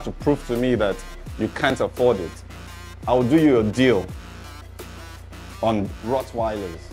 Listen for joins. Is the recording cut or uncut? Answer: cut